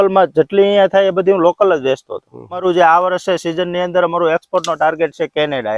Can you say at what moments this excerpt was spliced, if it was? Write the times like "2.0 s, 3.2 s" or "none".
2.6 s